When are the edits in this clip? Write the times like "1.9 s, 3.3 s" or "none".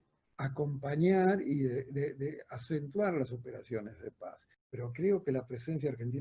4.7 s